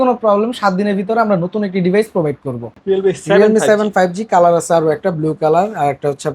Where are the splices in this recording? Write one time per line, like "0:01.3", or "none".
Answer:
0:02.7